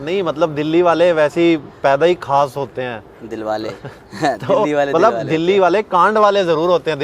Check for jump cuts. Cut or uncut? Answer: uncut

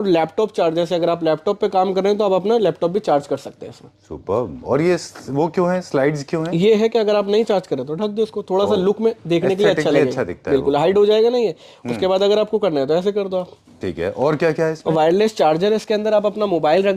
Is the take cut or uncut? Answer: uncut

